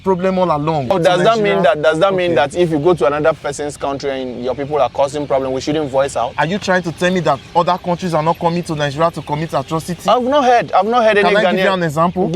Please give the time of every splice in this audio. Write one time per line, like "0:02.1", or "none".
0:00.9